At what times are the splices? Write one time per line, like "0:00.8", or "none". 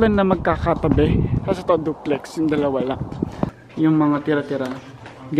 0:03.5